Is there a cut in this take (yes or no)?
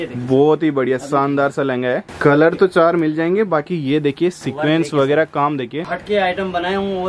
yes